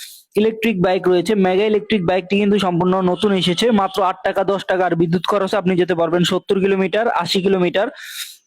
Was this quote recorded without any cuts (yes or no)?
no